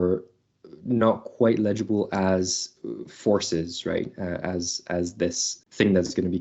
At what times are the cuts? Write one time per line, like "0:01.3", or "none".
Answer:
0:05.5